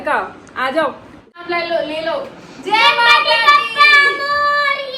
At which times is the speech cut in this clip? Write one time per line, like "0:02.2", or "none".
0:01.2